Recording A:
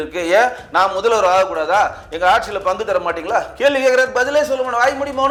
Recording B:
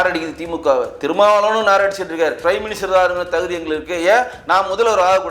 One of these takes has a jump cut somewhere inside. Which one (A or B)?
B